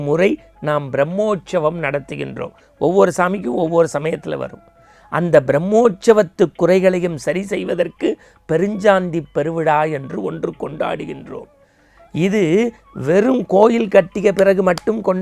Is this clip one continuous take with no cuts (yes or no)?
yes